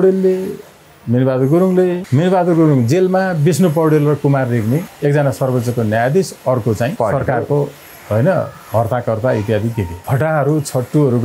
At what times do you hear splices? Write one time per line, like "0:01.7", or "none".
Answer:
0:02.0
0:04.9
0:06.9
0:09.9